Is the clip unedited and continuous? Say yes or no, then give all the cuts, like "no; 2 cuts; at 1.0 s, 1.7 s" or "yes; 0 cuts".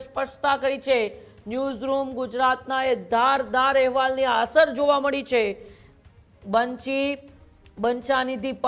yes; 0 cuts